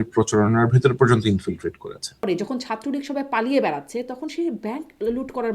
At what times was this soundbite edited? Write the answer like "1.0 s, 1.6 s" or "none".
2.3 s